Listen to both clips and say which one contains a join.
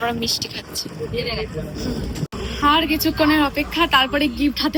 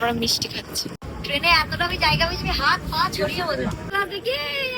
second; 2 cuts; at 1.0 s, 3.9 s

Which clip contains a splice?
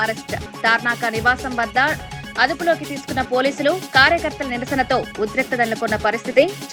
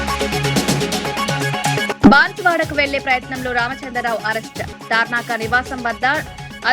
second; 1 cut; at 1.9 s

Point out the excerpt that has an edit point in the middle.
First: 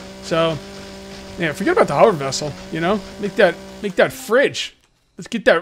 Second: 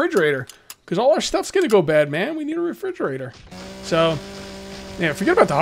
first; 1 cut; at 3.1 s

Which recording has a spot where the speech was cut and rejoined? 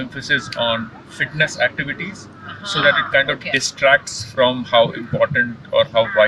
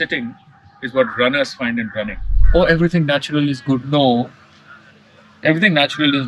second; 1 cut; at 2.3 s

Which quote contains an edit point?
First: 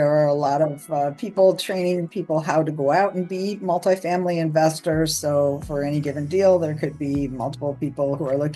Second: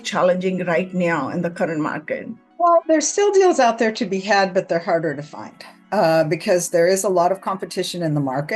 second; 1 cut; at 2.4 s

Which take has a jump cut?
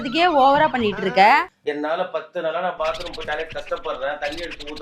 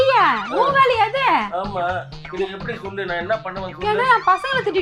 first; 1 cut; at 1.5 s

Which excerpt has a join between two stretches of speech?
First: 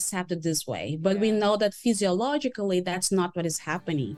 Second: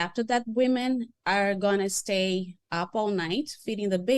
second; 2 cuts; at 1.1 s, 2.6 s

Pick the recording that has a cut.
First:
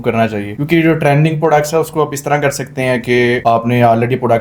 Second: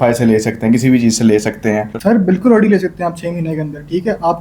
second; 1 cut; at 1.9 s

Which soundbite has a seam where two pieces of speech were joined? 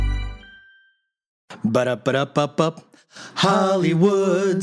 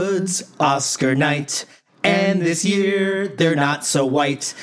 first; 1 cut; at 1.5 s

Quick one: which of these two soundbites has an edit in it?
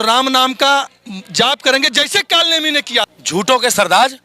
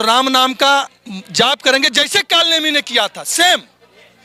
first; 1 cut; at 3.2 s

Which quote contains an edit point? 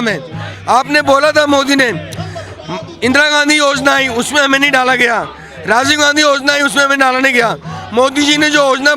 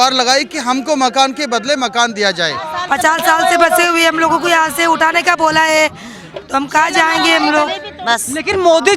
second; 2 cuts; at 2.7 s, 7.8 s

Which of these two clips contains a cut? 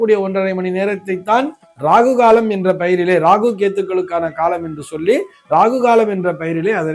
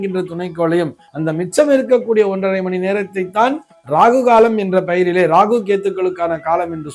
second; 1 cut; at 1.0 s

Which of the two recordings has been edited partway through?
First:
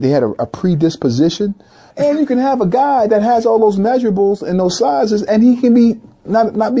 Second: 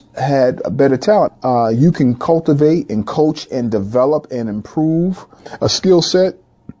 first; 1 cut; at 1.9 s

